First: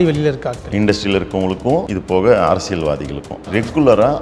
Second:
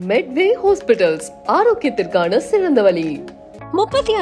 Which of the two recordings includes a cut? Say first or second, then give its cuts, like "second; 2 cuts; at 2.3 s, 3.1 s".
first; 2 cuts; at 1.9 s, 3.5 s